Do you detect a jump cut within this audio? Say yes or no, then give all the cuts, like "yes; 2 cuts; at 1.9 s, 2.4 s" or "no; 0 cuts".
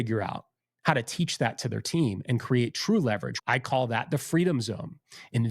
yes; 1 cut; at 3.3 s